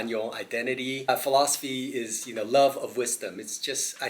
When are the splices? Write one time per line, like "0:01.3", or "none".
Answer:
0:01.1

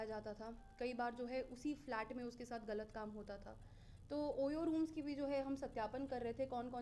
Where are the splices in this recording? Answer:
none

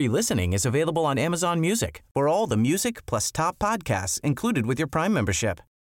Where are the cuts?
none

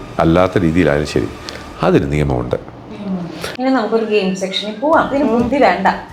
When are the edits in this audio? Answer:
0:03.4
0:05.1

